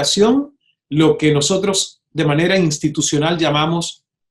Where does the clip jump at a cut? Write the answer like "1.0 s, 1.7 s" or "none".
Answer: none